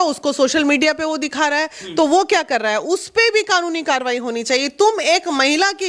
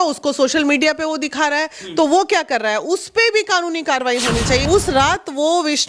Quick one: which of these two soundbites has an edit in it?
second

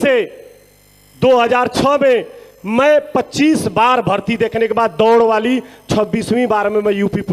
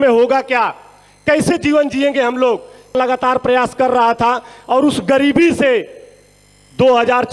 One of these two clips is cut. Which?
second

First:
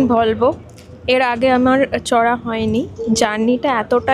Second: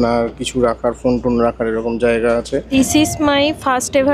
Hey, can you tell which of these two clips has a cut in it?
second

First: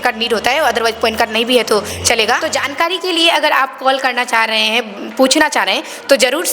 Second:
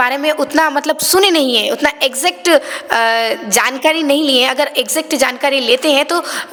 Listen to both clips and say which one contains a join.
first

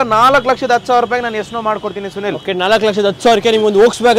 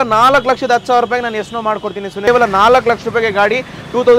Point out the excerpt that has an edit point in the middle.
second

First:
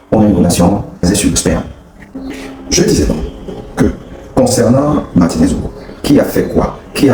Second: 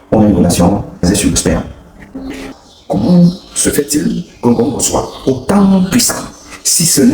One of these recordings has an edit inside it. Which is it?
second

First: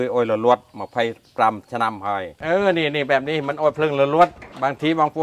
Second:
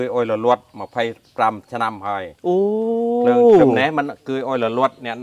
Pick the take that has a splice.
first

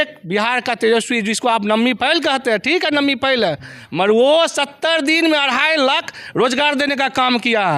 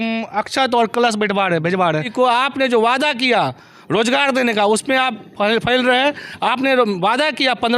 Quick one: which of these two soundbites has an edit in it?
second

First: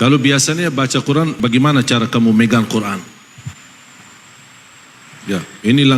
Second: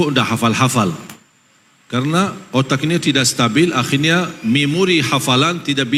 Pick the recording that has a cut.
first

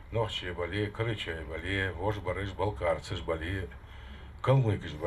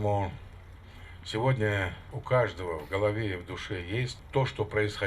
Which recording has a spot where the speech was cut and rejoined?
second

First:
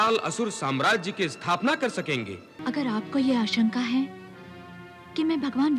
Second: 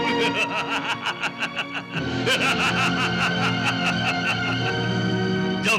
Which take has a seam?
first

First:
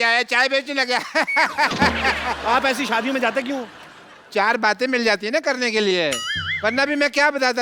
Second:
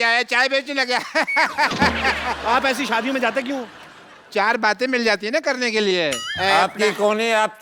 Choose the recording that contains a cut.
second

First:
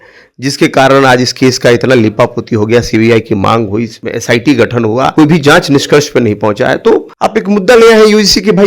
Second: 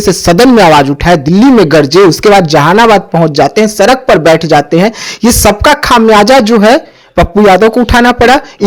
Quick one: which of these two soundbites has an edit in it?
first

